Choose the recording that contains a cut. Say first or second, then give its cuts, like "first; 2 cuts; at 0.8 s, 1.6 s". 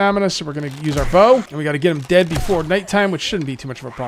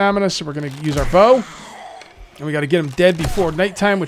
first; 1 cut; at 1.5 s